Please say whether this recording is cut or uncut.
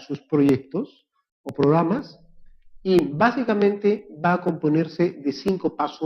cut